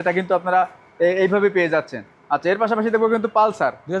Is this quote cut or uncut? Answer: uncut